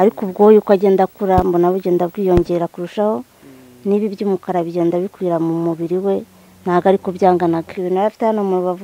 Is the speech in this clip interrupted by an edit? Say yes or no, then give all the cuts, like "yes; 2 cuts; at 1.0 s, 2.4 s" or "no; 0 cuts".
yes; 1 cut; at 7.8 s